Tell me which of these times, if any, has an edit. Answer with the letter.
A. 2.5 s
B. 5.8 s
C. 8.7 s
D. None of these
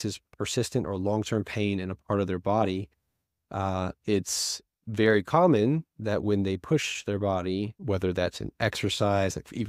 D